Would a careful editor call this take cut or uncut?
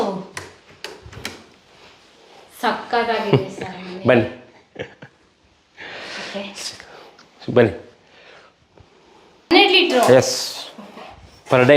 uncut